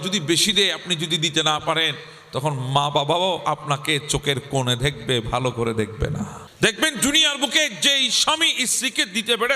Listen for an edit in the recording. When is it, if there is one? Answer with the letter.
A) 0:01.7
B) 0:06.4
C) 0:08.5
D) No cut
B